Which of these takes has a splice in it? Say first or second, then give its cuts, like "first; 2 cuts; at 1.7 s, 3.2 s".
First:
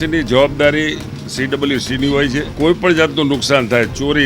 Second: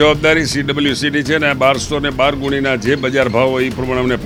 first; 1 cut; at 2.5 s